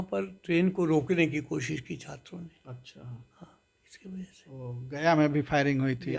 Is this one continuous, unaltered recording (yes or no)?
yes